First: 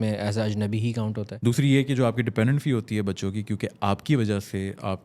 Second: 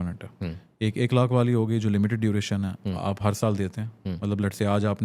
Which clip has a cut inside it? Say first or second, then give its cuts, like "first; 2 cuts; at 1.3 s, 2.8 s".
first; 1 cut; at 1.3 s